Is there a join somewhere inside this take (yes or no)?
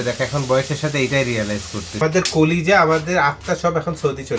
yes